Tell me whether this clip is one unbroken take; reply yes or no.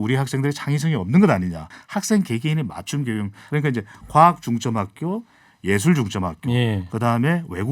no